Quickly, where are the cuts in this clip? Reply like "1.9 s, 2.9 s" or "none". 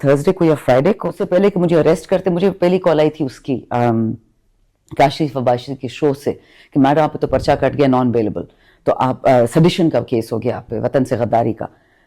1.1 s